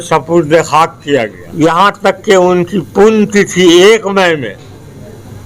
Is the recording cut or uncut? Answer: cut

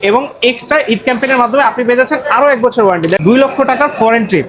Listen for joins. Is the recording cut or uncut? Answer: cut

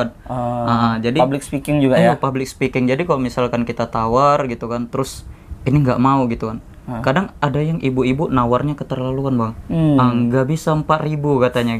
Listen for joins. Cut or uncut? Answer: uncut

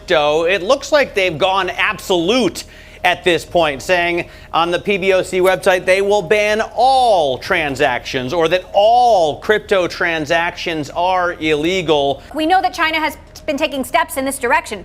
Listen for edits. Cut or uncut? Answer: cut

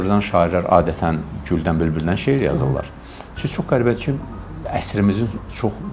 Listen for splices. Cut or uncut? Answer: uncut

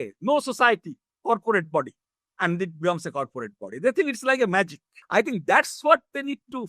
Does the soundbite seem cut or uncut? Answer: cut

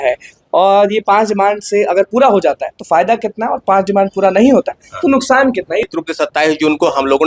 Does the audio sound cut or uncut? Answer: cut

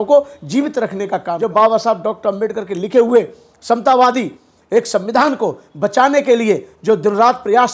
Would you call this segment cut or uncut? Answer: cut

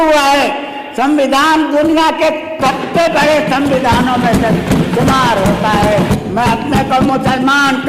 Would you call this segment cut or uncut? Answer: cut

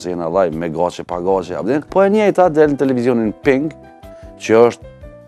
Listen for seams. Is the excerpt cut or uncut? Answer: cut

